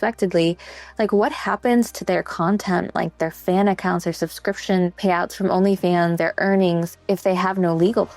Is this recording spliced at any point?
yes; 3 cuts; at 5.0 s, 6.2 s, 7.0 s

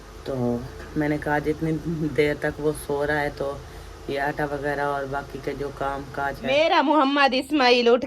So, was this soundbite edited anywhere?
yes; 1 cut; at 6.4 s

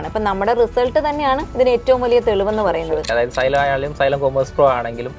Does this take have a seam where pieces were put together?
yes; 2 cuts; at 1.5 s, 3.1 s

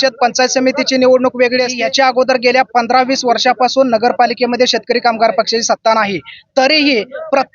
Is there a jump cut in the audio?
yes; 1 cut; at 1.7 s

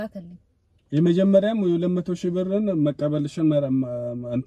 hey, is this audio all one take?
yes; 0 cuts

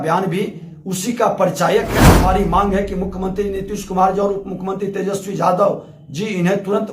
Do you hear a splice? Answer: yes; 1 cut; at 2.2 s

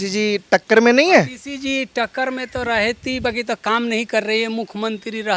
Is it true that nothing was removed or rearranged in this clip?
yes; 0 cuts

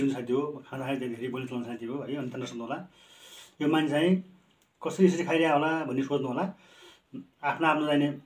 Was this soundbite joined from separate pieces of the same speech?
no; 0 cuts

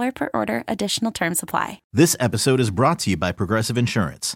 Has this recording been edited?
yes; 1 cut; at 1.8 s

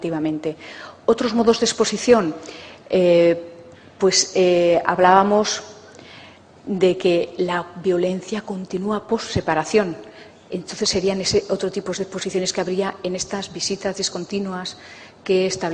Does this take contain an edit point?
yes; 1 cut; at 5.9 s

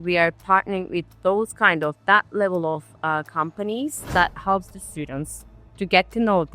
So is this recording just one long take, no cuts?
no; 1 cut; at 4.1 s

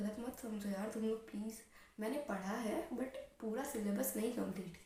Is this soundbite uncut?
yes; 0 cuts

